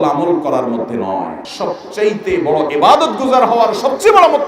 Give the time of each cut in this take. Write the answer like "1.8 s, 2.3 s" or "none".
1.4 s